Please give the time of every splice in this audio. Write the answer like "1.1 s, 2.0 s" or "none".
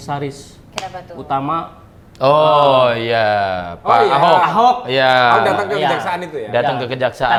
none